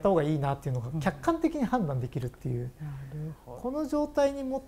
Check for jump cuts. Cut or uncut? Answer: uncut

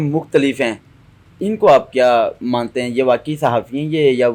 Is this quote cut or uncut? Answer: uncut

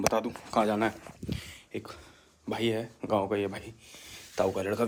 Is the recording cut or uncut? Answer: uncut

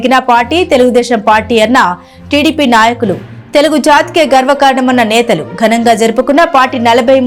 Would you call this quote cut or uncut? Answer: uncut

